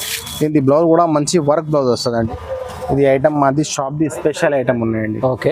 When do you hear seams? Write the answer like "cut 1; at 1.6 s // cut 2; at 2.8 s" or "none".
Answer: cut 1; at 2.3 s